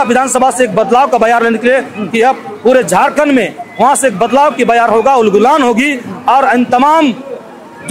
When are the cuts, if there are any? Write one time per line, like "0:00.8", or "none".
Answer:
none